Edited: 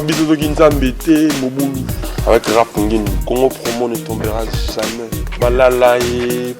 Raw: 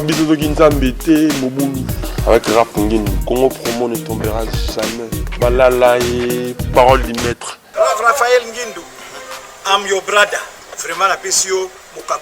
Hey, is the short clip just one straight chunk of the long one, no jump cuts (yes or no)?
yes